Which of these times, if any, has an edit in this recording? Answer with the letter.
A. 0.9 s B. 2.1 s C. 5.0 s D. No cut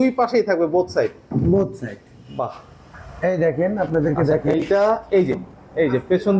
D